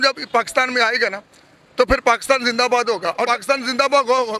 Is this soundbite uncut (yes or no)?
no